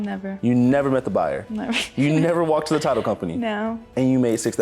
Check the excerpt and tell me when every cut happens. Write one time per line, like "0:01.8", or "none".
none